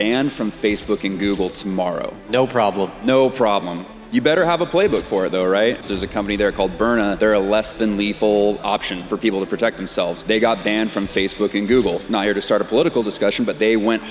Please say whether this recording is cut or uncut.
cut